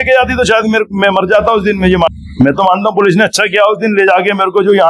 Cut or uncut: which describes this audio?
cut